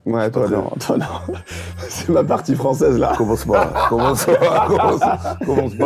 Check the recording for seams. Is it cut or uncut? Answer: uncut